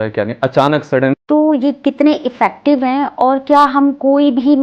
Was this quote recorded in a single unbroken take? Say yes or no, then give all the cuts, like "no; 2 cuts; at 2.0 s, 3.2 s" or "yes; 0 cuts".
no; 1 cut; at 1.1 s